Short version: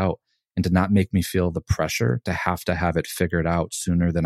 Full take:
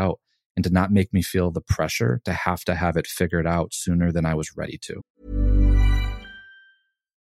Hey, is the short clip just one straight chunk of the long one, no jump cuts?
yes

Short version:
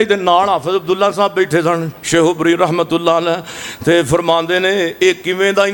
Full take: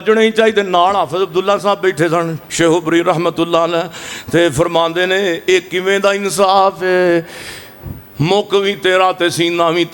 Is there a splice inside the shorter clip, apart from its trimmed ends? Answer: no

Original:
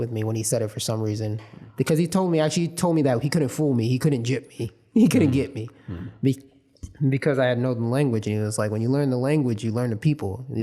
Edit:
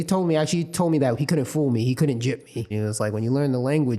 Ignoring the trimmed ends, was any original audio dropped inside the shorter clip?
yes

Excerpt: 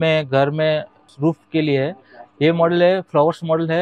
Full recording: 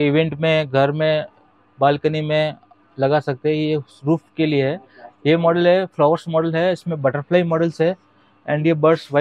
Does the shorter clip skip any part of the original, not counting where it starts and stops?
yes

